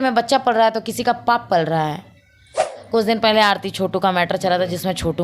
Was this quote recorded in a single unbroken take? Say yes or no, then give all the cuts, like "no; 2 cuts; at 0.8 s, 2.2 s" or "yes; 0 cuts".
no; 1 cut; at 2.7 s